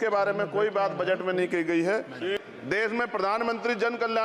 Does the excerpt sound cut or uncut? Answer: cut